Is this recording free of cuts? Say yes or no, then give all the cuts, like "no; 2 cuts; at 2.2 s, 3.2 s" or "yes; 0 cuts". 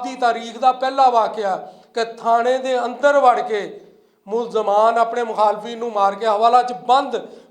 yes; 0 cuts